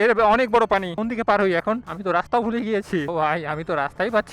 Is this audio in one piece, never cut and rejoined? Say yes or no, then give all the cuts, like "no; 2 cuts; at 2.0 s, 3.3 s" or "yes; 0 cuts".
no; 3 cuts; at 0.9 s, 1.9 s, 3.1 s